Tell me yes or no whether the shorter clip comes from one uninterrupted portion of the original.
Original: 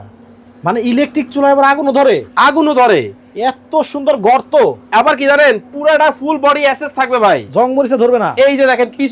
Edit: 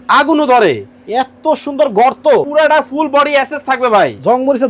no